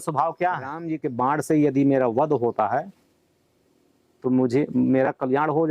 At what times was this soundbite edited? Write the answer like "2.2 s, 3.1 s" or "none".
1.0 s

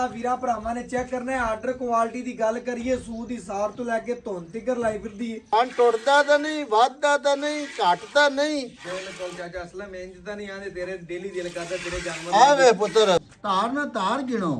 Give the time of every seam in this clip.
5.4 s, 13.3 s

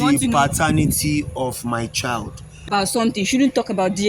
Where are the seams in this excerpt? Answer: 2.6 s

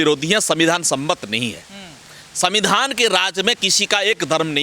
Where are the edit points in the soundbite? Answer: none

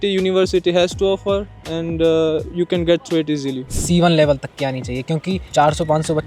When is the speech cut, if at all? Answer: 3.6 s, 5.4 s

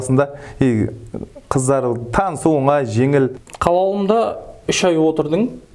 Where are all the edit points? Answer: 3.4 s

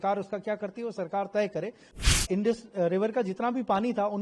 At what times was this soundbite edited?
2.2 s

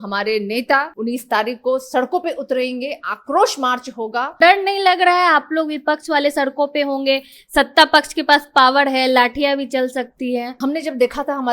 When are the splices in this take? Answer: 0.9 s, 4.4 s, 10.6 s

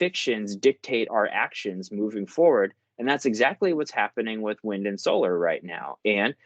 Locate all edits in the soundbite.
1.1 s

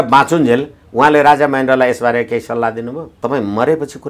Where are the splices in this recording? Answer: 3.1 s

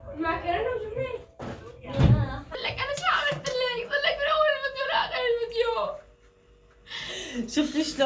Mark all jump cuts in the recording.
2.5 s

